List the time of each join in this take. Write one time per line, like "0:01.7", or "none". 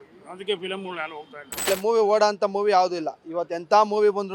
0:01.7

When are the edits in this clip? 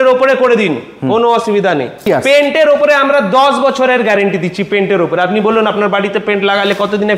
0:02.0

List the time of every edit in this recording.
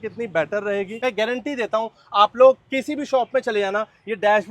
0:01.0

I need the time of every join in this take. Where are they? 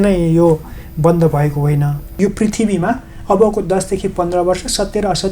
0:02.1

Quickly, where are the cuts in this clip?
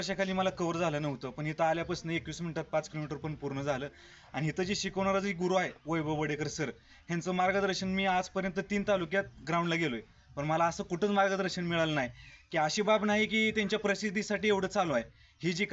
none

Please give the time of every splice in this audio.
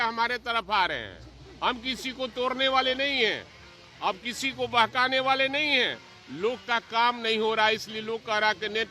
none

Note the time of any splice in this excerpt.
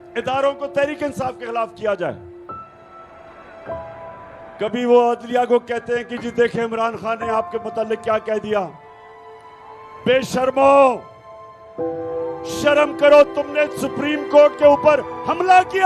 0:11.1
0:12.5

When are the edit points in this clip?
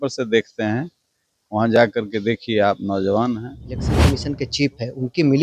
0:03.9

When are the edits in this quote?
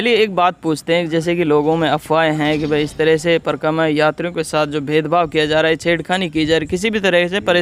none

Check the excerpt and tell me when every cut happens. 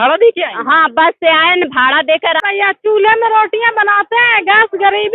0:02.4

